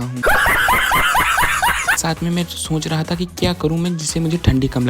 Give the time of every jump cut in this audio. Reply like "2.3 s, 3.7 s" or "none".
2.0 s